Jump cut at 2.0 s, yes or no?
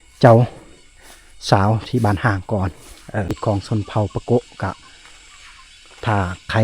no